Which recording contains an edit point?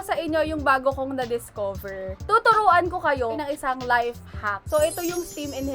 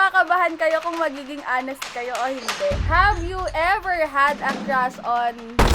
first; 2 cuts; at 2.2 s, 4.6 s

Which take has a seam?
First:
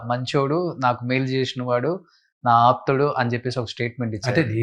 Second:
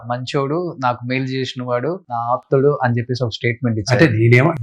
second; 1 cut; at 2.1 s

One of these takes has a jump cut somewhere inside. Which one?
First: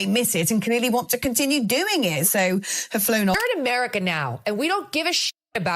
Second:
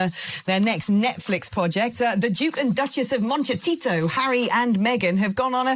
first; 1 cut; at 3.3 s

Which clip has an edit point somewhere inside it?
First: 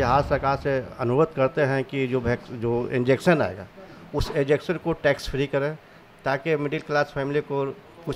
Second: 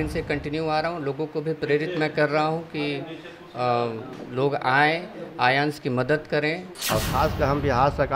second; 1 cut; at 6.7 s

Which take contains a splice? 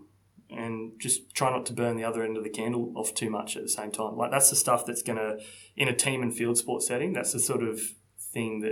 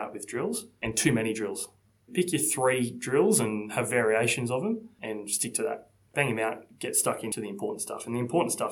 second; 5 cuts; at 0.8 s, 2.1 s, 4.9 s, 6.1 s, 7.3 s

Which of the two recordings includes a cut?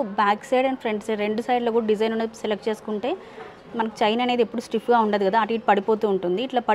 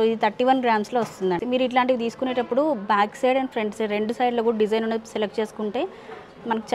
second; 1 cut; at 1.4 s

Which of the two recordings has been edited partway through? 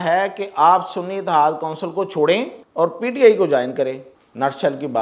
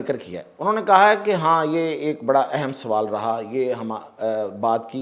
first; 2 cuts; at 2.6 s, 4.1 s

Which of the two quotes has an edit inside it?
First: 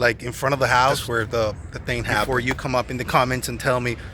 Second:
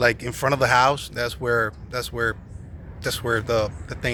first; 2 cuts; at 1.0 s, 2.3 s

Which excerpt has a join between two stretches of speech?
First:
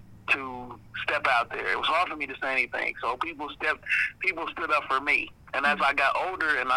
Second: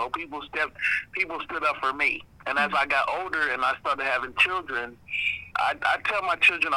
second; 1 cut; at 5.5 s

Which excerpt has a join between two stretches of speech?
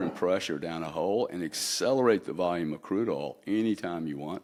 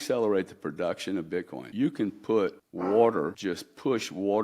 second; 3 cuts; at 1.6 s, 2.7 s, 3.4 s

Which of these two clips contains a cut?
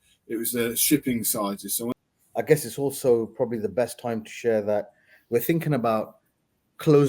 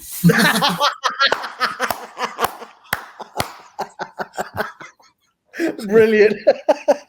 first; 1 cut; at 1.9 s

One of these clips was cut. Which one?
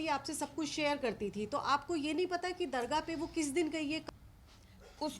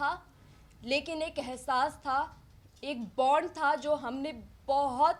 first; 1 cut; at 4.0 s

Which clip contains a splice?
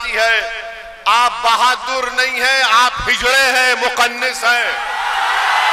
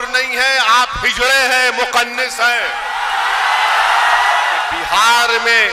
second; 1 cut; at 4.8 s

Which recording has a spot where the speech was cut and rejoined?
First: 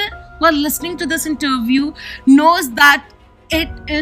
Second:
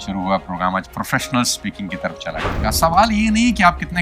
second; 1 cut; at 2.5 s

